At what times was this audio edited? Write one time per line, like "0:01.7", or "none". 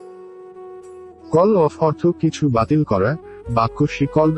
0:01.3